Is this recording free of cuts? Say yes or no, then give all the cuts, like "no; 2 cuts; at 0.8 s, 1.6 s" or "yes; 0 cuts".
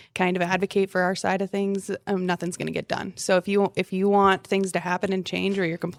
yes; 0 cuts